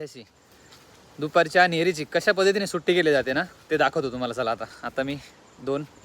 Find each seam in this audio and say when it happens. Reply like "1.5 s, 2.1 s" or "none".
4.8 s